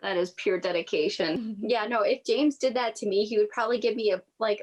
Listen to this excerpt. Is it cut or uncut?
cut